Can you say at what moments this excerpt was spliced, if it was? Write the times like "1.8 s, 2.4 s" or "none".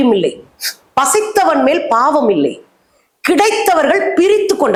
none